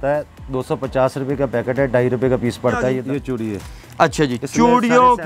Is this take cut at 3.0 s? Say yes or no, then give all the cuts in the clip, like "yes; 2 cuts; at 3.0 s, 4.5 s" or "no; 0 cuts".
yes; 1 cut; at 3.0 s